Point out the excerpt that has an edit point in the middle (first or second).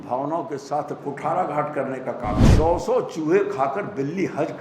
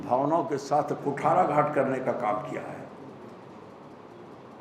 first